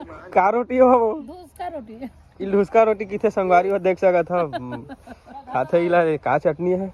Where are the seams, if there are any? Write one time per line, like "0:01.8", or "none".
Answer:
none